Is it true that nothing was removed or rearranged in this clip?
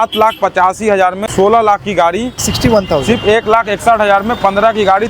no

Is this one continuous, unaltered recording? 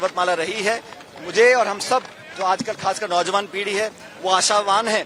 yes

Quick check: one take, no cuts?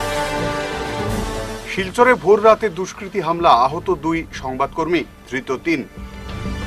yes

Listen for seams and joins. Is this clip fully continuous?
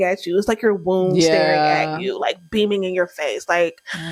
yes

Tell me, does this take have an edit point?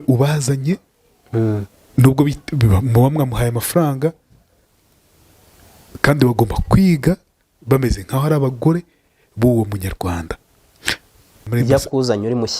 yes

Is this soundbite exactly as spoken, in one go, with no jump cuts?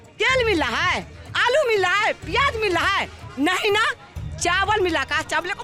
yes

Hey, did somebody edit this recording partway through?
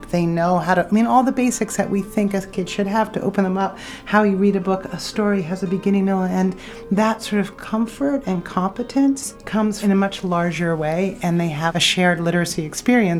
yes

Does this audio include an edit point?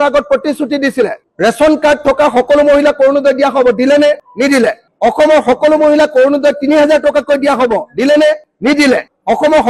yes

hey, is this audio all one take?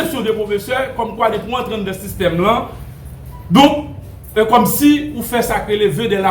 yes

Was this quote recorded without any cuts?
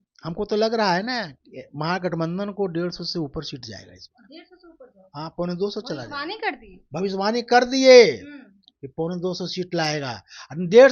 yes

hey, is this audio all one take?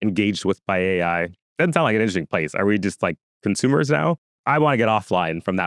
no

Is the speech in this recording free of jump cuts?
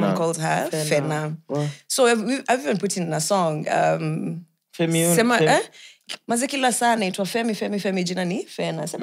yes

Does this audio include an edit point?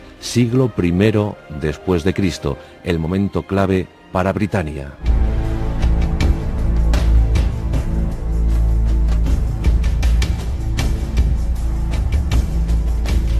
yes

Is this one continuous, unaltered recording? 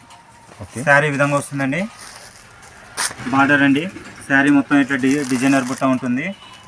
no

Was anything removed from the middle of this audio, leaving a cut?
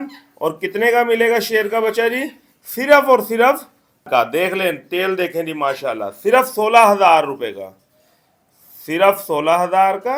no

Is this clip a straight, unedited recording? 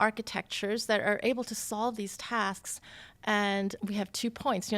no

